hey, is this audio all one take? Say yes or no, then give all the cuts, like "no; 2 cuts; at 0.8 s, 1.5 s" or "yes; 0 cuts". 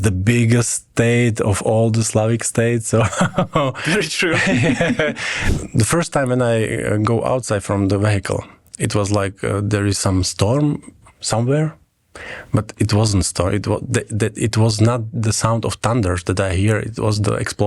no; 1 cut; at 5.3 s